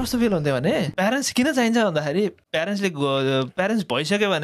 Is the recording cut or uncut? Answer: cut